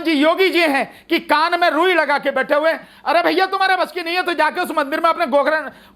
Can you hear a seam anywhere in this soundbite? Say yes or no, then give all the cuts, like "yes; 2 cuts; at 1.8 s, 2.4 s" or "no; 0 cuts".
no; 0 cuts